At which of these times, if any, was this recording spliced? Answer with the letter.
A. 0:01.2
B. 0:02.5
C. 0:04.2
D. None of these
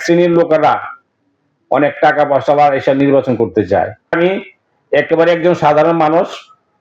C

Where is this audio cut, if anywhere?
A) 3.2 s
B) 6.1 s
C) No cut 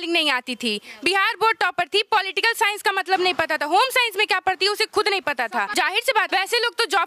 B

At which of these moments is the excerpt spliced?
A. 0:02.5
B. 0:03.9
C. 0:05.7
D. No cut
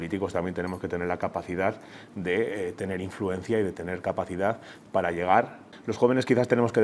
C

